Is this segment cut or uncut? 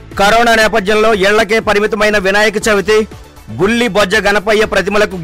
uncut